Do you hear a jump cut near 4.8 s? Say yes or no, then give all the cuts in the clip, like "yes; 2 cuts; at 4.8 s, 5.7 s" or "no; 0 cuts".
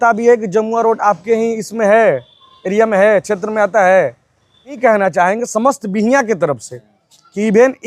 yes; 1 cut; at 4.8 s